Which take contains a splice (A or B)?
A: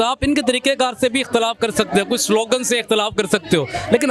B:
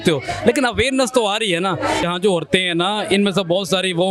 B